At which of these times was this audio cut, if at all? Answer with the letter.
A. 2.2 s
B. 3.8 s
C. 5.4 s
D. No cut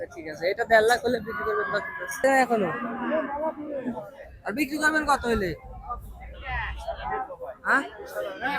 A